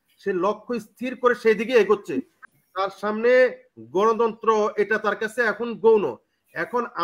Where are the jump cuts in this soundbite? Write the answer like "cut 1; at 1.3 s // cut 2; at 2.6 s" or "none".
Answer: cut 1; at 2.3 s